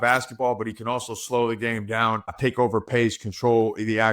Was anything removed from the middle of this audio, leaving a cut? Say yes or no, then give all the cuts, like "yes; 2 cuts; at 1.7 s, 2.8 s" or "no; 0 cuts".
yes; 1 cut; at 2.4 s